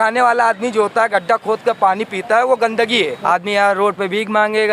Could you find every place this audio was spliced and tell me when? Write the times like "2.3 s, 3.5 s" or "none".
3.2 s